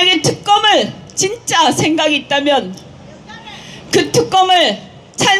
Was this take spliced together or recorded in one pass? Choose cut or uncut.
uncut